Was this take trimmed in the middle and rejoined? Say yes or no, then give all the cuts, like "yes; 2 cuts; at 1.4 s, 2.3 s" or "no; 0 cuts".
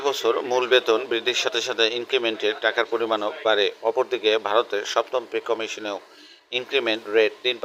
no; 0 cuts